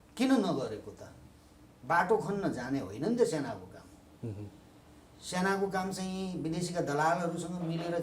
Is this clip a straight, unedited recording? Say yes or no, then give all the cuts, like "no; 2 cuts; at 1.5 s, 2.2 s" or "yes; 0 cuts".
yes; 0 cuts